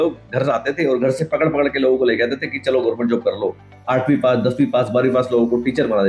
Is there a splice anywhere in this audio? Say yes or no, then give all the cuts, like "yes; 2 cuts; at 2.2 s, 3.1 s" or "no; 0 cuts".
no; 0 cuts